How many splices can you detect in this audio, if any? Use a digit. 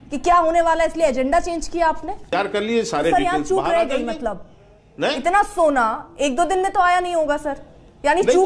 1